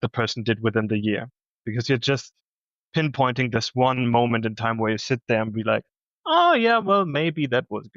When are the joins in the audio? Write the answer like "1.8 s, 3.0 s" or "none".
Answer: 1.6 s